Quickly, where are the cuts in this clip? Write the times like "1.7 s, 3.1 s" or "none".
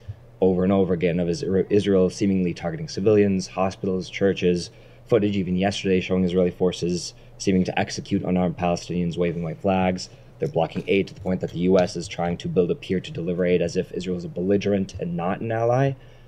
none